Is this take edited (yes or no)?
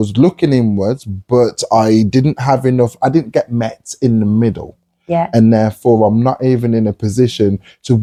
no